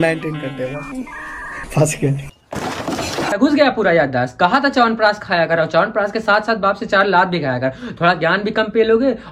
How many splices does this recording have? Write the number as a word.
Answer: one